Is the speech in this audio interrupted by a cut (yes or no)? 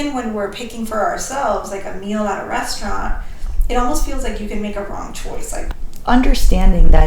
yes